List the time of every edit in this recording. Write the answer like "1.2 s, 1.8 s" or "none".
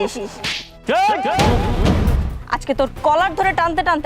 2.3 s